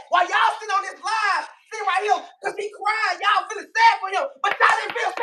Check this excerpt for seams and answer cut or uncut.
uncut